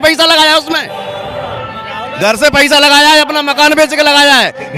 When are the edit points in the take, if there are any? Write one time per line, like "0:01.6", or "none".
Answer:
none